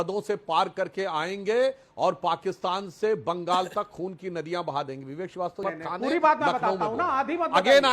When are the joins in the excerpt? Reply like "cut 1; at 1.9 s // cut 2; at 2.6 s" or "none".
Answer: cut 1; at 5.6 s